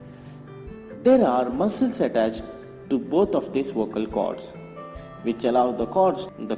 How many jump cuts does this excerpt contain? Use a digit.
1